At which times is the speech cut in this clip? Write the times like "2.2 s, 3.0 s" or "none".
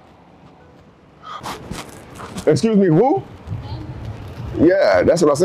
1.4 s